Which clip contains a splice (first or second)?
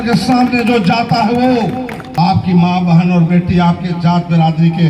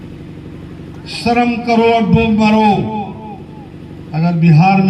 first